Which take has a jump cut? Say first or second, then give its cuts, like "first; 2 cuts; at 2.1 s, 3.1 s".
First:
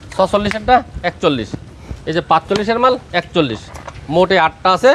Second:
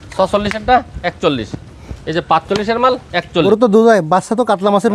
second; 1 cut; at 3.4 s